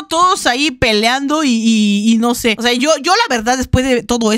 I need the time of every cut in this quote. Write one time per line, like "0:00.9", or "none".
none

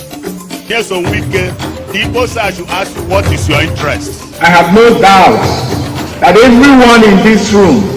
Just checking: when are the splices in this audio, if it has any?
0:01.2

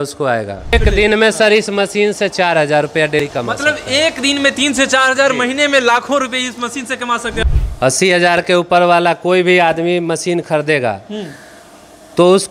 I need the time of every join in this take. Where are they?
0:00.7
0:03.2
0:07.4

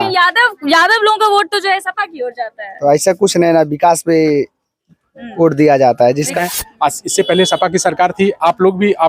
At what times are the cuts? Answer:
0:06.4

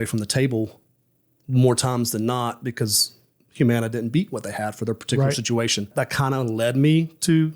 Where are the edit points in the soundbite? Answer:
0:05.9

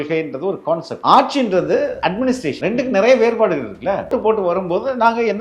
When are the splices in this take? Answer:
0:00.9
0:02.3
0:04.1

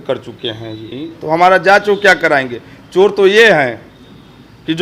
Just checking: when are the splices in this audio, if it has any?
0:01.1

